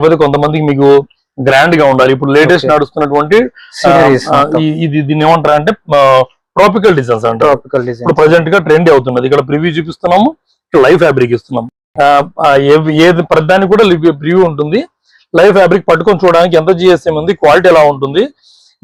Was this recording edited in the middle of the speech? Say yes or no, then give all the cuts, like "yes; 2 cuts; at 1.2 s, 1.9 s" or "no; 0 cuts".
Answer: no; 0 cuts